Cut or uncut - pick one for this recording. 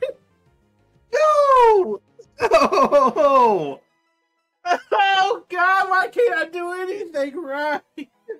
uncut